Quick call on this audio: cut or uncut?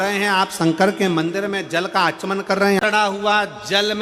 cut